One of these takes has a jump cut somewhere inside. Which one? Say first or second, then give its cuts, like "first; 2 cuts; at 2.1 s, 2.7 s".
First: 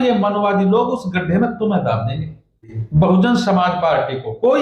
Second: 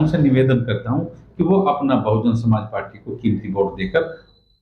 first; 1 cut; at 2.7 s